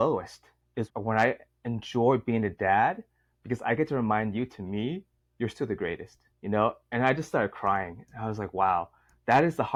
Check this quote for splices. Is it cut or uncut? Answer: uncut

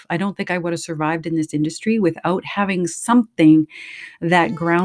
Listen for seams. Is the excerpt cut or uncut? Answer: uncut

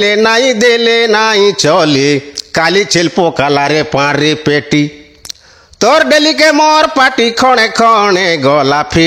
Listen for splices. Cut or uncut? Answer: uncut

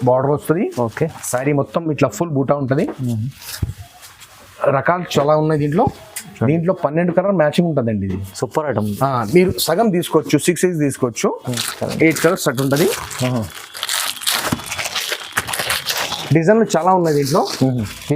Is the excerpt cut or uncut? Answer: cut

